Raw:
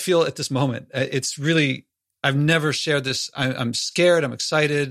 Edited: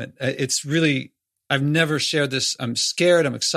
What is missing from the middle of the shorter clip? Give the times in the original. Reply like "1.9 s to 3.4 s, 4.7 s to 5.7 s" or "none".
3.3 s to 3.6 s